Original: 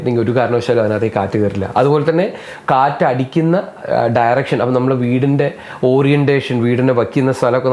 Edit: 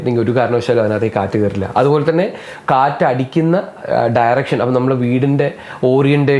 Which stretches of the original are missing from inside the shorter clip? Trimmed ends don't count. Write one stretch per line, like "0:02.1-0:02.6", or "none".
none